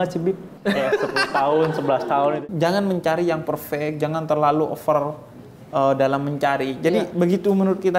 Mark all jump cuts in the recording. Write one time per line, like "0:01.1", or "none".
0:02.4